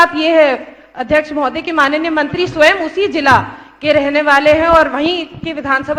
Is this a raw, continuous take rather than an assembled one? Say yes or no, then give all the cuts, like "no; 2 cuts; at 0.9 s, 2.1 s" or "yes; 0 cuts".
yes; 0 cuts